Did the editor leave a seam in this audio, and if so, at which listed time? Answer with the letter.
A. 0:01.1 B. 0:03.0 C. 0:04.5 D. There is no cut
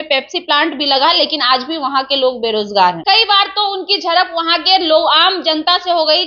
B